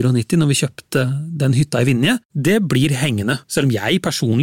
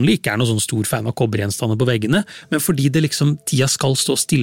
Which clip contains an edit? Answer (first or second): first